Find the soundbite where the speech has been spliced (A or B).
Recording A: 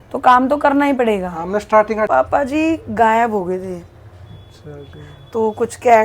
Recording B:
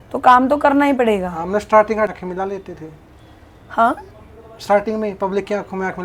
A